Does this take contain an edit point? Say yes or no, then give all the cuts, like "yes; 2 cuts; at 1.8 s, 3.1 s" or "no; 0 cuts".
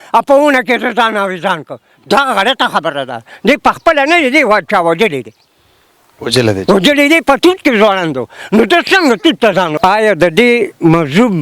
yes; 1 cut; at 9.8 s